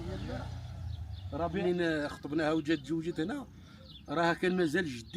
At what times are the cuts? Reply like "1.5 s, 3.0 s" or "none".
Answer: 1.6 s